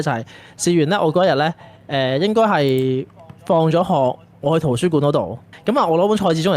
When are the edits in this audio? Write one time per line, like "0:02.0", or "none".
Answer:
0:05.5